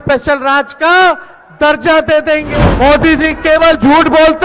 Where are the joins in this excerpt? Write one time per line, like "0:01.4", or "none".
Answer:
0:02.5